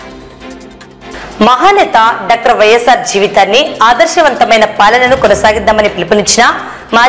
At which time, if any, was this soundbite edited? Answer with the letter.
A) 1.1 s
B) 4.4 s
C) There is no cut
A